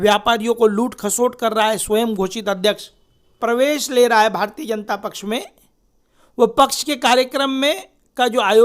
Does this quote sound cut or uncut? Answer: cut